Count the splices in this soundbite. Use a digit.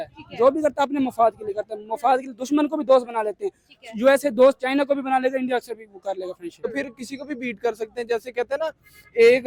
0